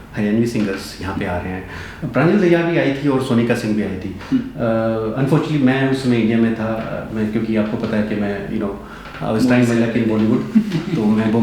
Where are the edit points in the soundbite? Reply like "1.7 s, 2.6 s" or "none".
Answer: none